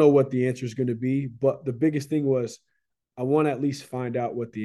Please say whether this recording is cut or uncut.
uncut